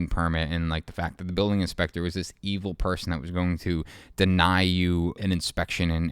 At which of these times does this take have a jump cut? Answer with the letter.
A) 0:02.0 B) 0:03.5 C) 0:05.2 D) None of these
C